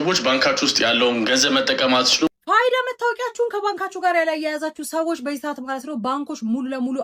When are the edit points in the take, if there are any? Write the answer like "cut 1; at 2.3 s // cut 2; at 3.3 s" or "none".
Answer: cut 1; at 2.3 s